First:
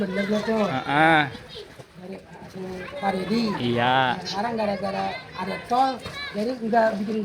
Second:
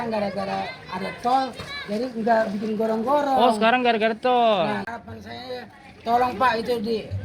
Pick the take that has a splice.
second; 1 cut; at 4.9 s

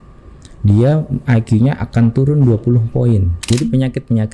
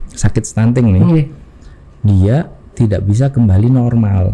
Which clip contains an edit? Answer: first; 1 cut; at 3.4 s

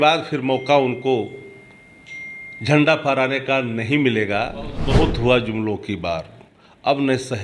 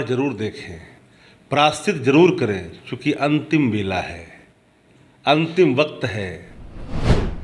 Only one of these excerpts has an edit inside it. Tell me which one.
first; 1 cut; at 4.8 s

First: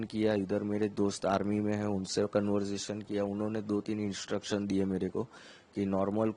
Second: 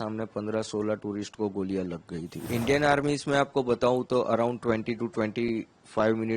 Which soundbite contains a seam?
second; 1 cut; at 2.4 s

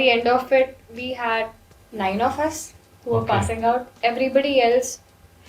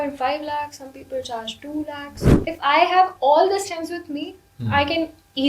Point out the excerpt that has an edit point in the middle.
second; 1 cut; at 2.5 s

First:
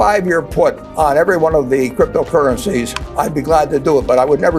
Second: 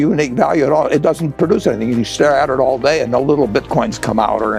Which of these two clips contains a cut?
first; 2 cuts; at 0.8 s, 3.0 s

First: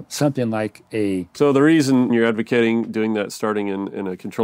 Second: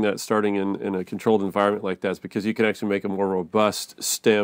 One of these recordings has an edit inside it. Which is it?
first; 2 cuts; at 1.3 s, 2.1 s

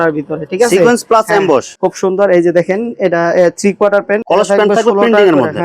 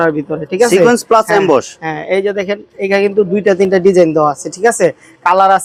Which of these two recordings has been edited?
first; 2 cuts; at 1.7 s, 4.2 s

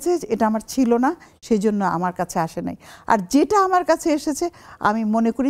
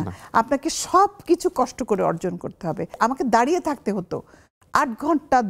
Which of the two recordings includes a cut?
second; 1 cut; at 3.0 s

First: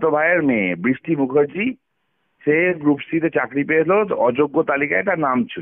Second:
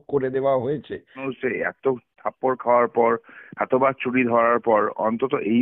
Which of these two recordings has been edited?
second; 1 cut; at 1.3 s

